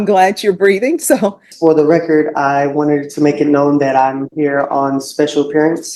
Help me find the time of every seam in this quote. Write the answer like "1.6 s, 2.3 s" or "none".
1.5 s